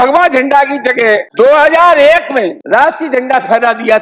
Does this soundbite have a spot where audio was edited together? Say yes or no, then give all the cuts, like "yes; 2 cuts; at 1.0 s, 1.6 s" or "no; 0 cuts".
yes; 2 cuts; at 1.3 s, 2.6 s